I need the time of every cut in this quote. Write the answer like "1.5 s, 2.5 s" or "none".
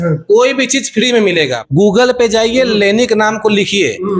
1.6 s

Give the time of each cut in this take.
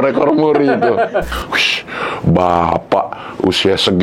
1.3 s

